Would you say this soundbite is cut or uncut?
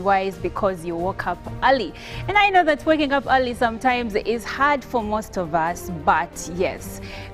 cut